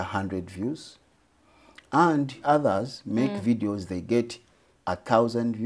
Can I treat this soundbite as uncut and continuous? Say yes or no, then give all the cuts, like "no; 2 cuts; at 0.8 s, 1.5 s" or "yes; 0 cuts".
no; 1 cut; at 2.4 s